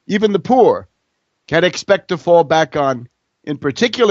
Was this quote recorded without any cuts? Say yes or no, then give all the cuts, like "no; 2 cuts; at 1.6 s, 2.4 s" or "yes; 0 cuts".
yes; 0 cuts